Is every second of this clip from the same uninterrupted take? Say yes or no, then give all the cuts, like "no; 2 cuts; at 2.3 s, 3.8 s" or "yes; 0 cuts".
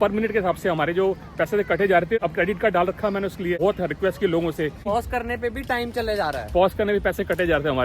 no; 3 cuts; at 2.2 s, 3.6 s, 4.8 s